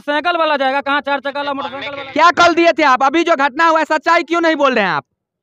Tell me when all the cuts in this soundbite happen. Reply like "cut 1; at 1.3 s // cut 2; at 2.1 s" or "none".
cut 1; at 1.8 s